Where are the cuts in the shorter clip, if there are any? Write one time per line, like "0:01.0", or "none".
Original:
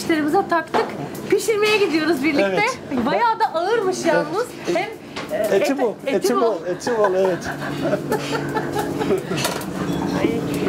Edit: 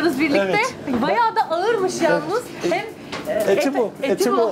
none